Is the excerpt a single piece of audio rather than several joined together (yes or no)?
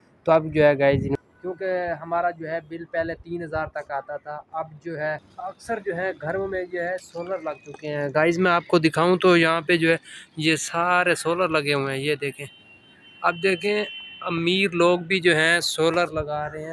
no